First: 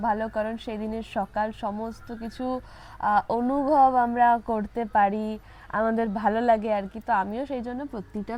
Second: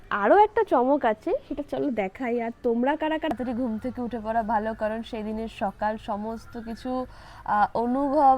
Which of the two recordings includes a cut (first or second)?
second